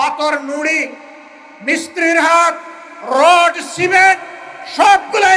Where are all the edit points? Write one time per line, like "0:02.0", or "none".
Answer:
none